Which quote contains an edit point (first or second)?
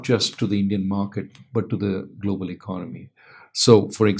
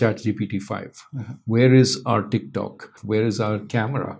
second